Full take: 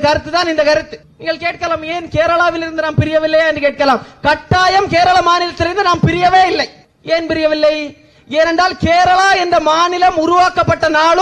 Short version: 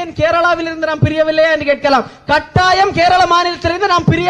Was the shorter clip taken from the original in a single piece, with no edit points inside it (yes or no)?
yes